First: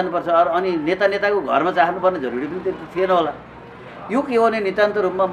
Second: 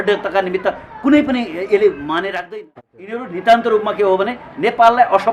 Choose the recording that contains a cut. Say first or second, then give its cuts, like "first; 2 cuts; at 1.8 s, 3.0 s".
second; 1 cut; at 2.5 s